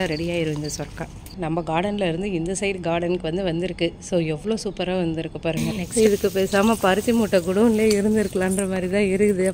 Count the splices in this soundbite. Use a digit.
2